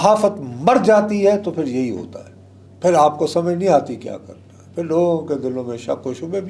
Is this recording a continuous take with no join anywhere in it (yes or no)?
yes